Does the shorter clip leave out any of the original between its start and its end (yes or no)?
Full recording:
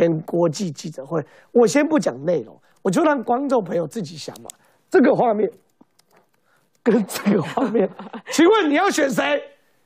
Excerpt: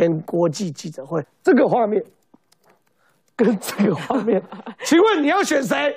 yes